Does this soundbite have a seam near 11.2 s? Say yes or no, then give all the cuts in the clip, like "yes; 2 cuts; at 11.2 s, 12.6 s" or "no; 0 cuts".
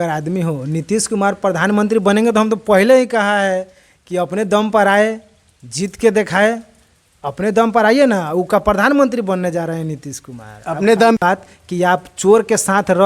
yes; 1 cut; at 11.2 s